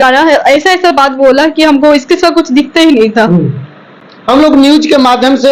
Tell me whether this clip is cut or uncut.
uncut